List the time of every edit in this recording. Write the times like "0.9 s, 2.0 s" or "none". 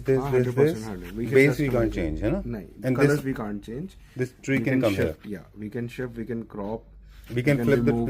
none

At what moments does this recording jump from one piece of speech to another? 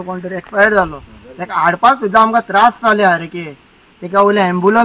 none

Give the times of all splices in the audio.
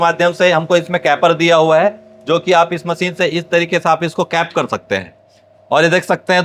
none

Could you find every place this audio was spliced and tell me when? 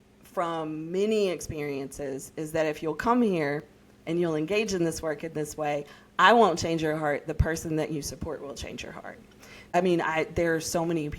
9.7 s

